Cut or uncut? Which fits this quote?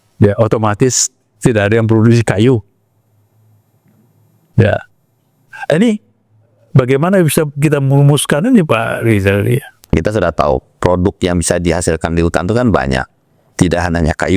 cut